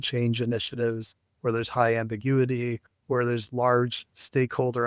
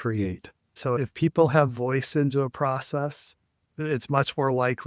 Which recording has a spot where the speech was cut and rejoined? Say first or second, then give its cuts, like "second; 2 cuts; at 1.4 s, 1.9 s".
second; 1 cut; at 1.0 s